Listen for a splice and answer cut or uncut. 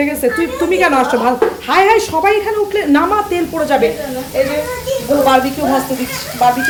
uncut